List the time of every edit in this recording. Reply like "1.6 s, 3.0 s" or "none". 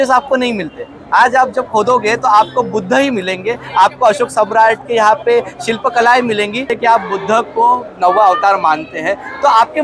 6.7 s